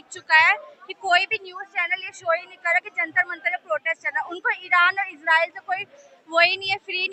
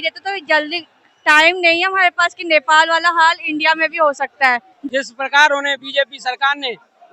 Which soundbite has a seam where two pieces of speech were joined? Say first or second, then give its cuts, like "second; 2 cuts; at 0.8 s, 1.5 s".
second; 1 cut; at 4.8 s